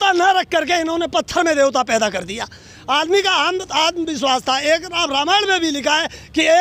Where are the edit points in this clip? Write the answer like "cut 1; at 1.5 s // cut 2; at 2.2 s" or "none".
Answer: none